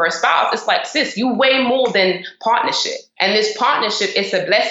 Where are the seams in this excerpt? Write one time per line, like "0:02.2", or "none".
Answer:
none